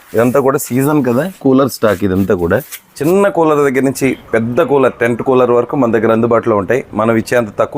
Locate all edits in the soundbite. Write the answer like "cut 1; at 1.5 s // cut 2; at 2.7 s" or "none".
cut 1; at 2.8 s

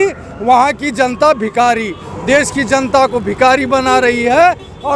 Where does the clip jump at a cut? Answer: cut 1; at 2.0 s

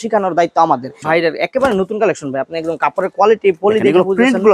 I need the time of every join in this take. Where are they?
cut 1; at 1.0 s

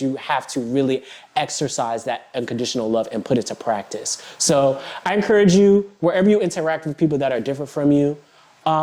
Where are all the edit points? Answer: none

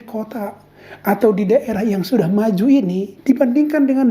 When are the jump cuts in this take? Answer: cut 1; at 3.1 s

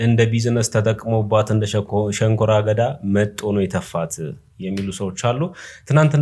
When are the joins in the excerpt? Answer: none

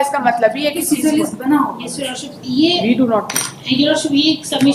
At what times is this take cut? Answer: none

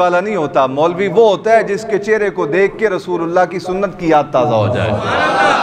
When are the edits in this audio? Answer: none

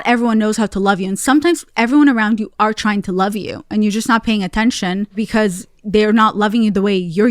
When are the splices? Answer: cut 1; at 5.2 s

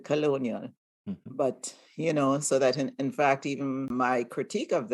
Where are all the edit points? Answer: cut 1; at 3.9 s

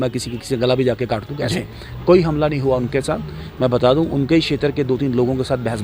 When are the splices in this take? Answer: cut 1; at 1.5 s

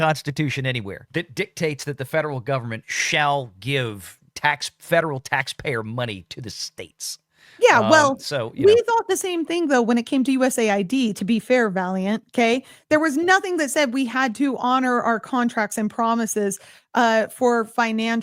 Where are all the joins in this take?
cut 1; at 0.9 s

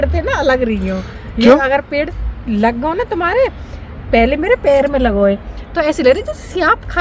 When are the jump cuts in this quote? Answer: none

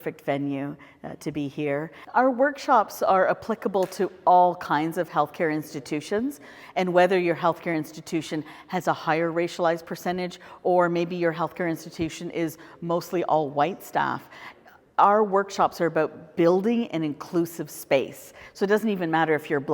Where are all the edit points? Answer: cut 1; at 2.0 s

